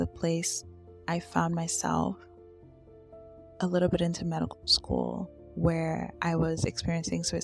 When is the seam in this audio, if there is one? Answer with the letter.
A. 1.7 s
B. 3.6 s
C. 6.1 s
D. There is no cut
C